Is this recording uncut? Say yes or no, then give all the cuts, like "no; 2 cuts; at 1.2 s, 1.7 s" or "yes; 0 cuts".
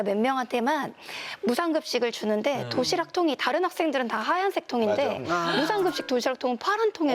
yes; 0 cuts